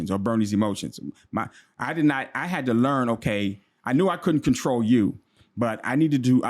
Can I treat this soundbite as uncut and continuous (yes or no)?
yes